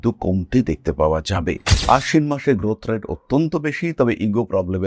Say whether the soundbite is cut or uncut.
cut